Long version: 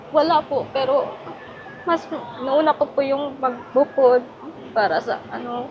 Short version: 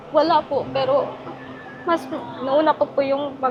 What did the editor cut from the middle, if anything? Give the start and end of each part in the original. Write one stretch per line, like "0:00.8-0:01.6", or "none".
none